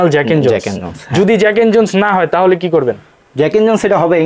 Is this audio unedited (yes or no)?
yes